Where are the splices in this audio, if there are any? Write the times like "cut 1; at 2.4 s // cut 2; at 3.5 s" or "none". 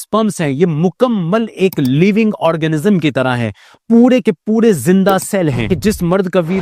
cut 1; at 5.7 s